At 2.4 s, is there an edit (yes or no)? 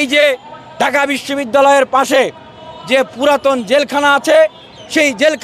no